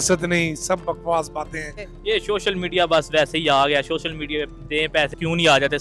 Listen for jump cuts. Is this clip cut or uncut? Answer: cut